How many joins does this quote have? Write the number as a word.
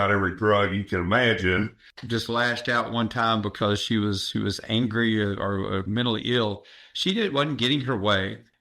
one